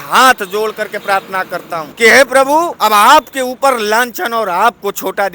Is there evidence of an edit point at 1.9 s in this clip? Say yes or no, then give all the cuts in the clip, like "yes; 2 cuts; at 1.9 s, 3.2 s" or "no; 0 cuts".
yes; 2 cuts; at 1.9 s, 2.7 s